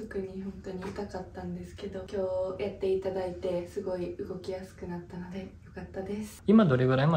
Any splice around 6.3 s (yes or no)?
yes